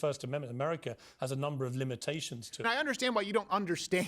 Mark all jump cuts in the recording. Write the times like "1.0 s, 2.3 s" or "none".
2.7 s